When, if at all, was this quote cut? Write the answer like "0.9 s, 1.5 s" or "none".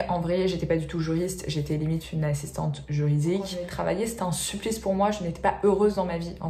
3.6 s